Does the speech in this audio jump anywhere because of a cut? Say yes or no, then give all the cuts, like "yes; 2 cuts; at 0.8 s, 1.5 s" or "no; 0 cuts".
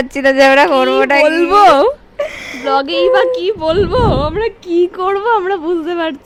no; 0 cuts